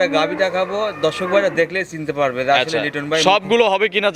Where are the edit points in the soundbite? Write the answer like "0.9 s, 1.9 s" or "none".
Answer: none